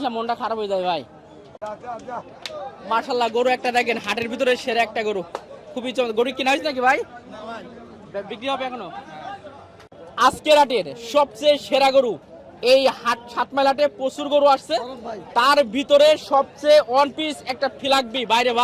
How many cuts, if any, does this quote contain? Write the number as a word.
two